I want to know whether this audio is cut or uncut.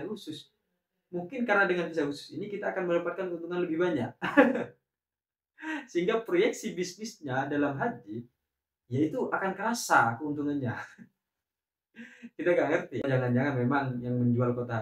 cut